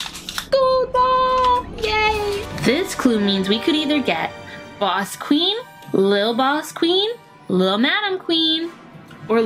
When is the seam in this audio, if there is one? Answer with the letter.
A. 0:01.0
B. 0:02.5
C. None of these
B